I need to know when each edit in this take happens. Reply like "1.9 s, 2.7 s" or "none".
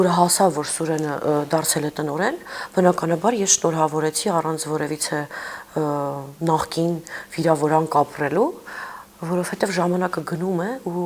none